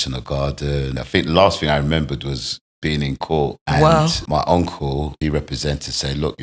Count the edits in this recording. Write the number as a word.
four